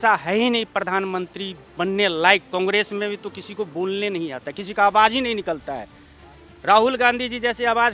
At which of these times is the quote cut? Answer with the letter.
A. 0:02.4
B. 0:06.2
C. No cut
C